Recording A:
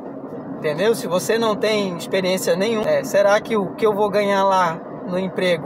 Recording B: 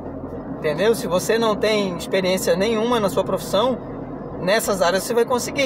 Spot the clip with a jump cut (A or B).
A